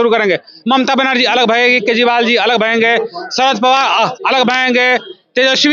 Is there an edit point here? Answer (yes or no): no